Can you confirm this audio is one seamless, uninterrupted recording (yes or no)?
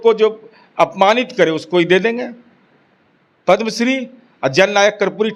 yes